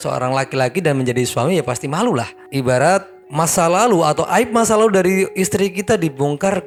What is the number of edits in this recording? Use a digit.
0